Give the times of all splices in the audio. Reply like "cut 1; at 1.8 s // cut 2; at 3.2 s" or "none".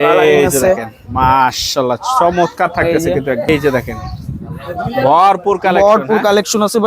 cut 1; at 3.5 s